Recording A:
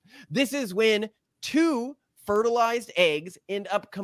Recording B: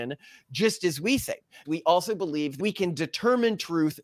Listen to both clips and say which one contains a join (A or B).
B